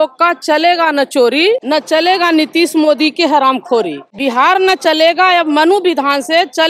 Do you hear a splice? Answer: yes; 2 cuts; at 1.6 s, 4.1 s

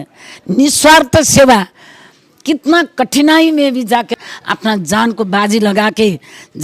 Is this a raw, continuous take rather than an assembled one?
no; 1 cut; at 4.2 s

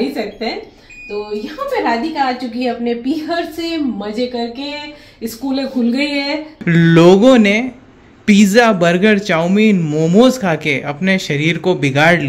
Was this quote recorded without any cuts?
no; 1 cut; at 6.5 s

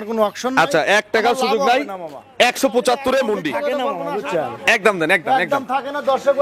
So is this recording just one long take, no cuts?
no; 1 cut; at 3.9 s

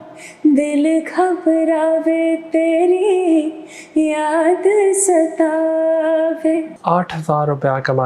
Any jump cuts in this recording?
yes; 1 cut; at 6.7 s

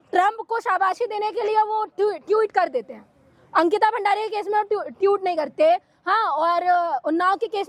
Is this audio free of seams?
yes; 0 cuts

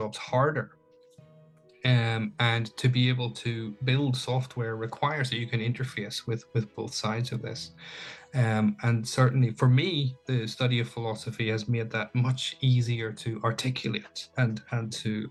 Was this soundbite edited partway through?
no; 0 cuts

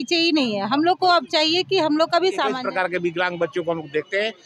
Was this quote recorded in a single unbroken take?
no; 1 cut; at 2.6 s

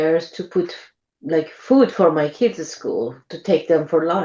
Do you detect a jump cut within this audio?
no; 0 cuts

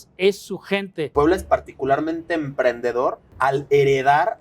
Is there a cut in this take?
yes; 2 cuts; at 1.1 s, 3.3 s

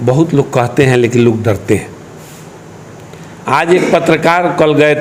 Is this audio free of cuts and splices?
yes; 0 cuts

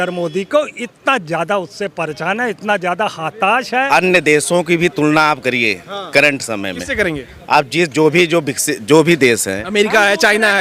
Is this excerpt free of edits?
no; 1 cut; at 3.9 s

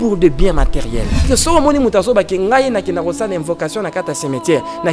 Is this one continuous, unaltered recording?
no; 1 cut; at 1.3 s

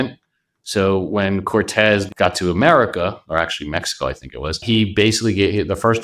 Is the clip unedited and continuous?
no; 2 cuts; at 2.1 s, 4.6 s

